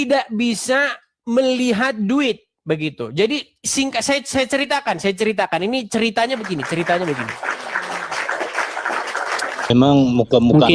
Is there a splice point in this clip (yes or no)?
yes